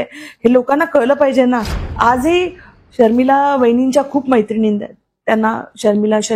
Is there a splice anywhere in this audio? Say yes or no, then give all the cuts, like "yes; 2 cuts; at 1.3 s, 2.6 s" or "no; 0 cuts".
yes; 1 cut; at 1.8 s